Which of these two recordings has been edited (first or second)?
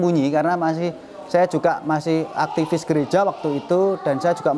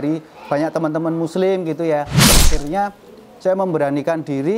second